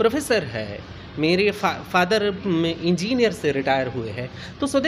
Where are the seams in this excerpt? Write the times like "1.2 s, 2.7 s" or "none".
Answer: none